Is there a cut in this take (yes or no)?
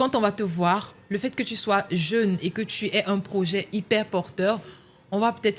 no